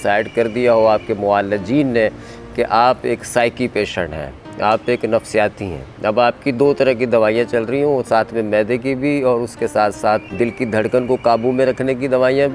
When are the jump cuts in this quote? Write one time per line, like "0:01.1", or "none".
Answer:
0:10.3